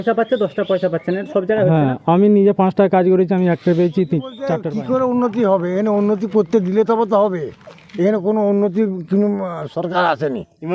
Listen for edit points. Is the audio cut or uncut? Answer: cut